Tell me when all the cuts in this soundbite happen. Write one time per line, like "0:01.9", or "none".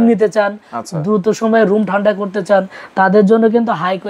none

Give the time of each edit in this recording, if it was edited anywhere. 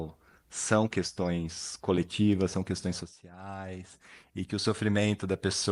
none

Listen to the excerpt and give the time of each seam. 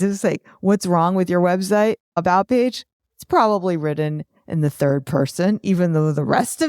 0:02.2

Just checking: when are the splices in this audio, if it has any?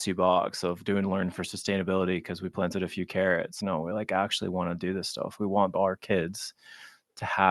0:03.5
0:05.5

